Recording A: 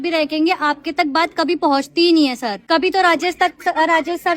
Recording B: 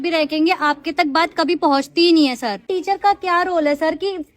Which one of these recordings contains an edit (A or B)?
B